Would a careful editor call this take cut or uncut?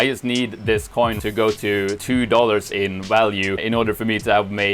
cut